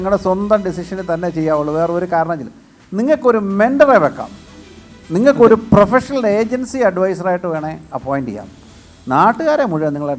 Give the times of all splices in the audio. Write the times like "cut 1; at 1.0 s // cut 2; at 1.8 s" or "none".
none

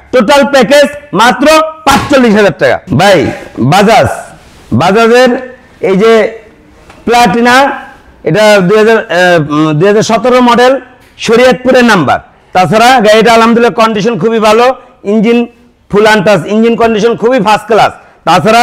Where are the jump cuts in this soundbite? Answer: none

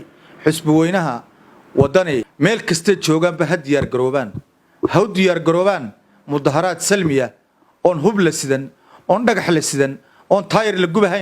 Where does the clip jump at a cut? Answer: cut 1; at 2.3 s

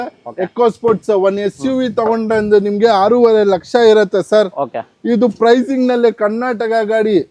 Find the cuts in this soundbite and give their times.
none

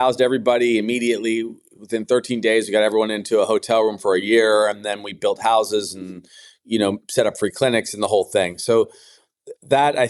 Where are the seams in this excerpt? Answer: none

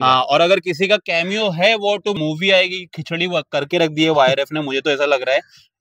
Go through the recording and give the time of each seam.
cut 1; at 2.1 s

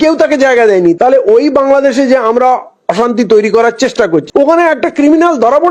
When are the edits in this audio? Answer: cut 1; at 1.0 s // cut 2; at 4.2 s

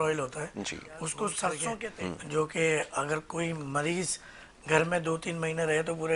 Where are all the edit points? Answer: cut 1; at 1.9 s

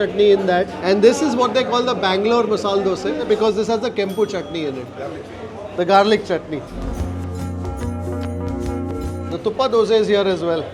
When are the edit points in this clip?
none

